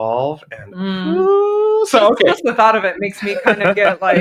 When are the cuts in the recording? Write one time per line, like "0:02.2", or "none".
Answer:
none